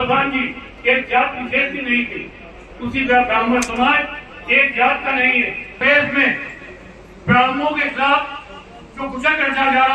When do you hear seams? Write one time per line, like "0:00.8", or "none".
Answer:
0:05.8